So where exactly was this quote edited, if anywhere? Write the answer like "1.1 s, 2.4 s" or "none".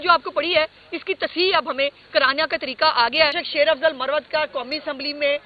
3.4 s